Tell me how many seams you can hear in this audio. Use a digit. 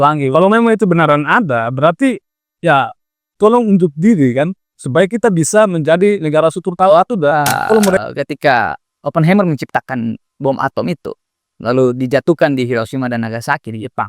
1